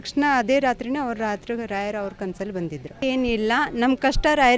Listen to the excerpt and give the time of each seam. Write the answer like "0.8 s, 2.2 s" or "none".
3.0 s